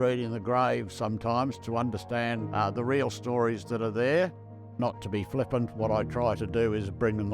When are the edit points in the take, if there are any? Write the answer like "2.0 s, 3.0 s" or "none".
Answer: 2.4 s, 4.8 s